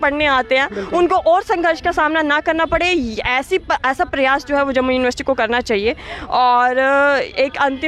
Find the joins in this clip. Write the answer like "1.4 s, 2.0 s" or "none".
none